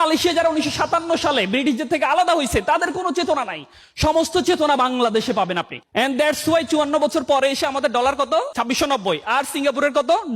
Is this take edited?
yes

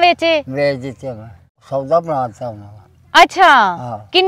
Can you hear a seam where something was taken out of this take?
yes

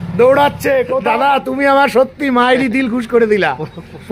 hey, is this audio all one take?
no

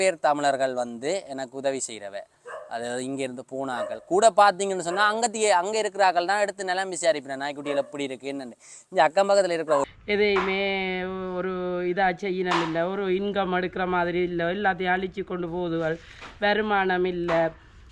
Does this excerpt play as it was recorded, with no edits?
no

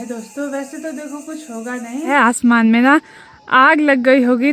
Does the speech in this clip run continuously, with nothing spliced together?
no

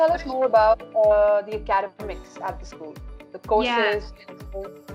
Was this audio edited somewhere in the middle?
no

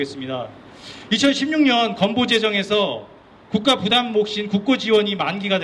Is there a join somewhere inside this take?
no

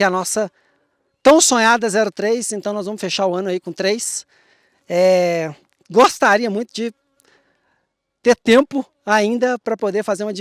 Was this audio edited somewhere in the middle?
no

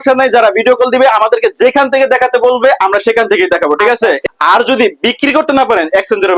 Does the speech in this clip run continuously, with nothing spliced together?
no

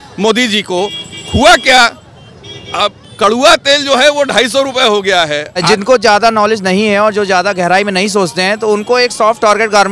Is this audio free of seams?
no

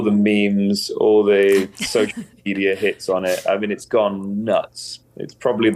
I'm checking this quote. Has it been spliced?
no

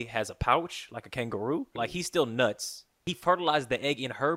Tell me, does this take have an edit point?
yes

